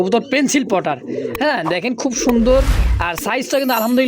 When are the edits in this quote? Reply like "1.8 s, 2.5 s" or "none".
none